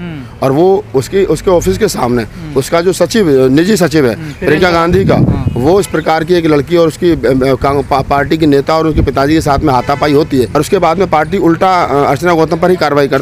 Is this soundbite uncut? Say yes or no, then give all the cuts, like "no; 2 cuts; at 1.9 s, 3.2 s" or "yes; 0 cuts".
yes; 0 cuts